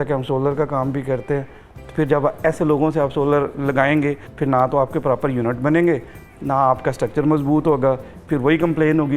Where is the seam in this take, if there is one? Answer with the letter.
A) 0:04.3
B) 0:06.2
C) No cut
A